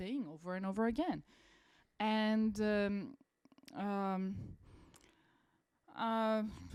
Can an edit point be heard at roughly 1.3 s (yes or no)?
no